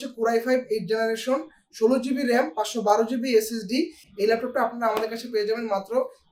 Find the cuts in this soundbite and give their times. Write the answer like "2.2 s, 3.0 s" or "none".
4.0 s